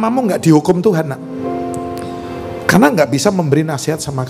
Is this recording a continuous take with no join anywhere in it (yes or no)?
yes